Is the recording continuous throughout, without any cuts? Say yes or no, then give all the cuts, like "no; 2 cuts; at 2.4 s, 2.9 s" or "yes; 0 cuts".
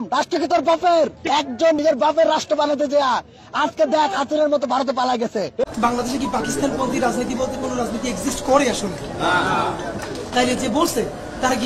no; 2 cuts; at 1.3 s, 5.6 s